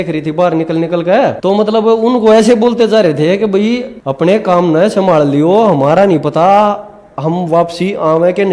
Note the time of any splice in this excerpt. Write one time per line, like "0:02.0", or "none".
0:01.4
0:04.0